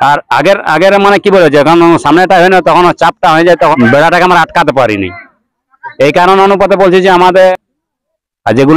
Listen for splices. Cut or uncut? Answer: cut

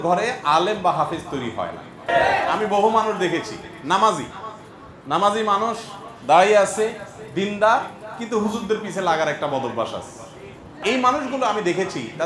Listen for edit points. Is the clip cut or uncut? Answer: cut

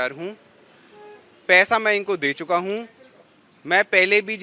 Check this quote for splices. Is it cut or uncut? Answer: uncut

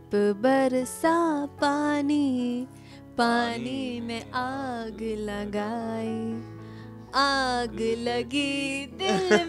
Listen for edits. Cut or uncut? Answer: uncut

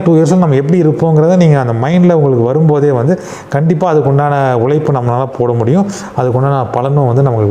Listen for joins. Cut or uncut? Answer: uncut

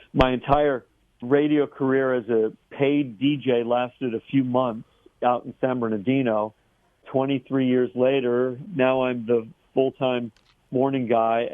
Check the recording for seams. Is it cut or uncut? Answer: cut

